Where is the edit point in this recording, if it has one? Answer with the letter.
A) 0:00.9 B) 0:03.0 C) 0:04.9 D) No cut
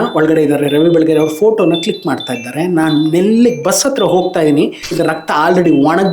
C